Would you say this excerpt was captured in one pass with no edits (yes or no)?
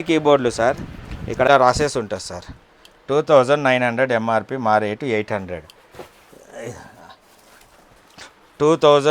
no